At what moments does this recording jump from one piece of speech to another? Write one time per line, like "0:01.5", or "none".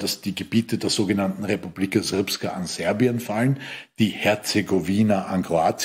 none